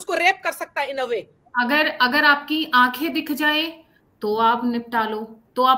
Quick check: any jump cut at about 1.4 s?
yes; 1 cut; at 1.4 s

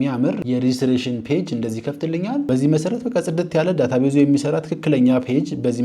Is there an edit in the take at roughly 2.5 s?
yes; 1 cut; at 2.5 s

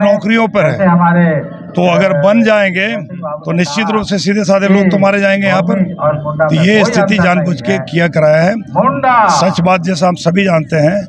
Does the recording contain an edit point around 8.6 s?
no; 0 cuts

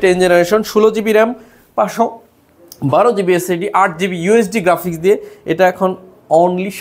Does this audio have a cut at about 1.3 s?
no; 0 cuts

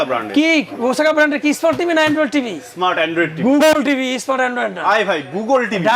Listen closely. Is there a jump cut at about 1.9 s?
no; 0 cuts

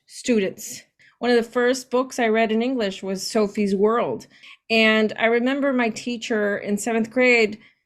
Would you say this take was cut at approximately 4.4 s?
yes; 2 cuts; at 1.0 s, 4.4 s

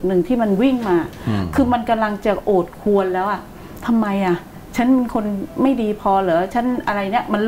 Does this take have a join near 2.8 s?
no; 0 cuts

